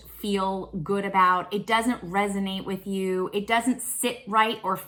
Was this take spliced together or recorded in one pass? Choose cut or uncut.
uncut